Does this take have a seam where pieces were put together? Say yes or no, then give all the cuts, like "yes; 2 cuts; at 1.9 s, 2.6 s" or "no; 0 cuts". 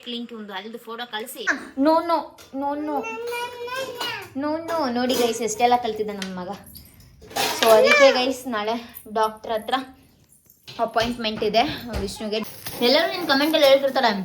yes; 2 cuts; at 1.6 s, 12.4 s